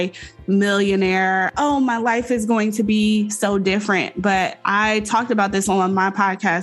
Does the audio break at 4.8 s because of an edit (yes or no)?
no